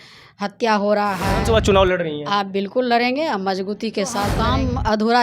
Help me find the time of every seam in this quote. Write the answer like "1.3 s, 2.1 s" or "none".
1.3 s, 4.4 s